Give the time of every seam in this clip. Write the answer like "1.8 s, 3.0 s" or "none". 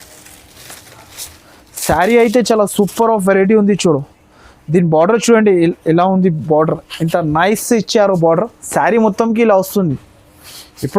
8.6 s